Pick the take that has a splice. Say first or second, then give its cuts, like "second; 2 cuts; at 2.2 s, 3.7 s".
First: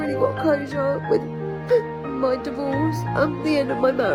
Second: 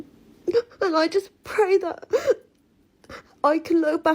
second; 1 cut; at 1.0 s